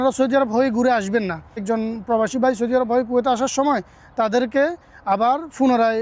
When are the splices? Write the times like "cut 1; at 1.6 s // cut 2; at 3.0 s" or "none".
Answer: cut 1; at 1.6 s